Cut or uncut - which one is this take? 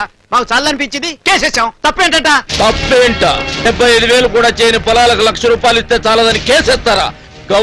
cut